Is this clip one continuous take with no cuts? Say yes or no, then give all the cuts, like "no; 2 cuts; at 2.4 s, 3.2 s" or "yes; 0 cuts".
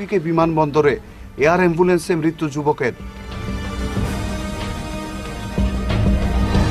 yes; 0 cuts